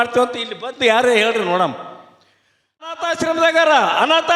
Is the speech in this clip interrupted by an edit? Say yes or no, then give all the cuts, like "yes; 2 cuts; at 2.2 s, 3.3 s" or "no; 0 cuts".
yes; 1 cut; at 2.9 s